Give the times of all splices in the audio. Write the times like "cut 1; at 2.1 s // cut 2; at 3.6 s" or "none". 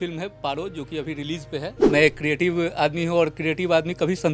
cut 1; at 1.8 s

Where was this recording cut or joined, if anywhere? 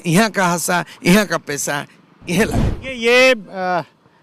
cut 1; at 2.8 s

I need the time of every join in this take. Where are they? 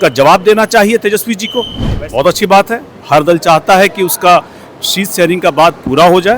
cut 1; at 1.8 s

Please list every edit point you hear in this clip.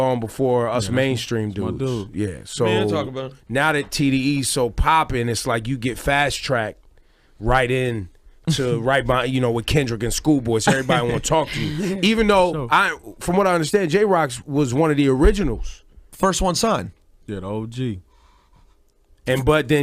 cut 1; at 1.8 s

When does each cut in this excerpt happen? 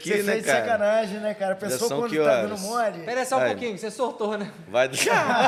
none

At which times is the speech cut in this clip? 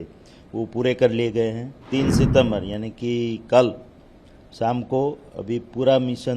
cut 1; at 1.8 s

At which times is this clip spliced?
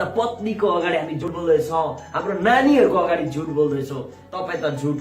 cut 1; at 1.2 s

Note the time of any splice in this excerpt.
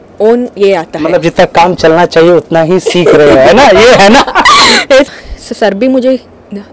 cut 1; at 5.1 s

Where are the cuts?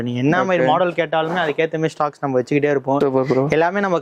cut 1; at 3.0 s

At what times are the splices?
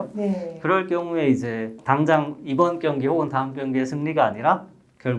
cut 1; at 1.8 s

